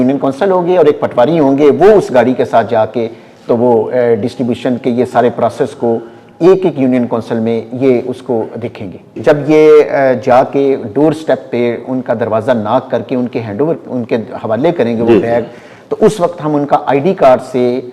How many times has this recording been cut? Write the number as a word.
one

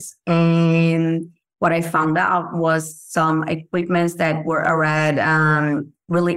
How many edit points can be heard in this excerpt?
zero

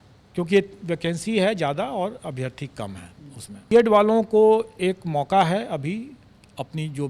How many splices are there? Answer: one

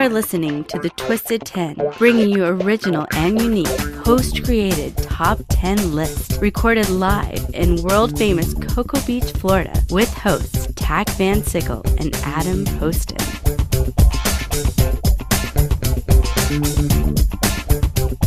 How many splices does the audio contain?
one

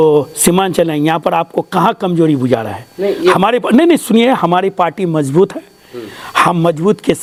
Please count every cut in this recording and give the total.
zero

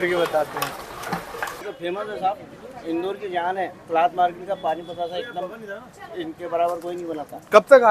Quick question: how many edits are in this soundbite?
one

